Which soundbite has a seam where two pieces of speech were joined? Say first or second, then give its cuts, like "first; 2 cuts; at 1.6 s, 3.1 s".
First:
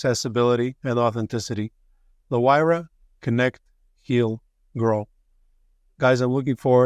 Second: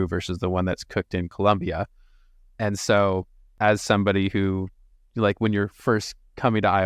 second; 1 cut; at 3.5 s